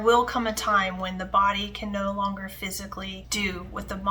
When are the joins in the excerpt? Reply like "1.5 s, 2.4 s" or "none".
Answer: 3.2 s

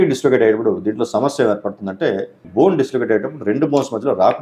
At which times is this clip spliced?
2.4 s

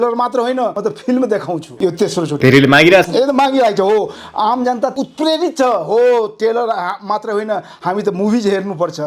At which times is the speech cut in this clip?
0.8 s, 1.7 s, 4.9 s

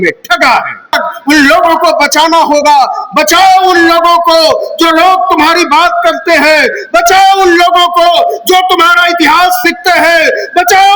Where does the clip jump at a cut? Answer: 1.0 s

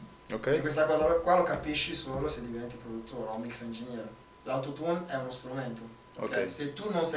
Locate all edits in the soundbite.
4.2 s

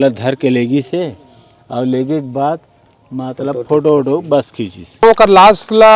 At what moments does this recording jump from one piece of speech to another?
5.0 s

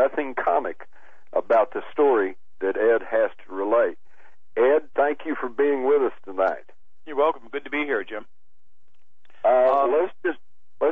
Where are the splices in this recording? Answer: 1.3 s

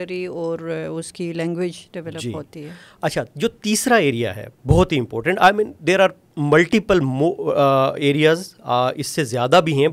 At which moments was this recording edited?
none

